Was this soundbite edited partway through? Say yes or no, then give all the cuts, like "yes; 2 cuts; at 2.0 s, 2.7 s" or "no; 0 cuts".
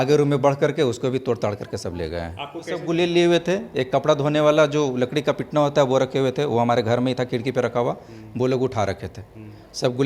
yes; 1 cut; at 2.8 s